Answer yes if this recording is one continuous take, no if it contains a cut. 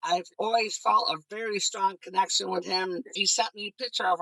no